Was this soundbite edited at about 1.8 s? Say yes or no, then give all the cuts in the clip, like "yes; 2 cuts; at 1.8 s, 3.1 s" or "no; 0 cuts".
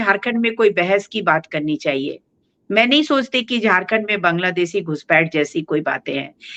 no; 0 cuts